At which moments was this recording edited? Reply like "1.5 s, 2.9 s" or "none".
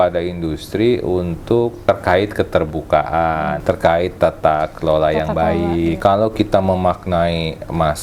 1.8 s, 3.6 s, 6.0 s